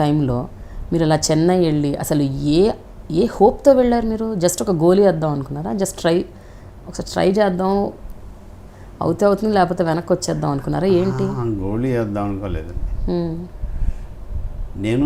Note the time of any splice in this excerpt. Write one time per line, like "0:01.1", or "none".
none